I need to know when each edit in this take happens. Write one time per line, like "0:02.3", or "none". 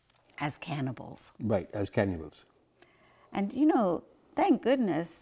none